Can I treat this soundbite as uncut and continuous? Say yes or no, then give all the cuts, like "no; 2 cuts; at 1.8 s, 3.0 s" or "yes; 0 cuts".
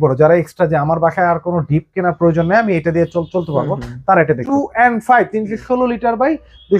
no; 1 cut; at 4.4 s